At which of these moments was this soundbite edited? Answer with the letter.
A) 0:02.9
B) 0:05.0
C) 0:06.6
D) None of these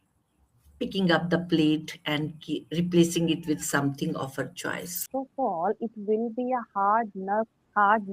B